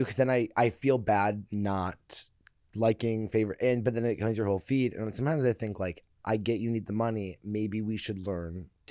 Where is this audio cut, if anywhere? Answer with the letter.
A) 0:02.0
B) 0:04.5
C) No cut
C